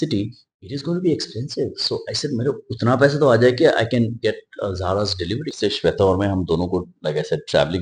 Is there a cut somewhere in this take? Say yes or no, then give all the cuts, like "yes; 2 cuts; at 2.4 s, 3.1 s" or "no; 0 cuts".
yes; 1 cut; at 5.5 s